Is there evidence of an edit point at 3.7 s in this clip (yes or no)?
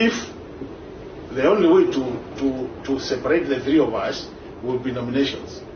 no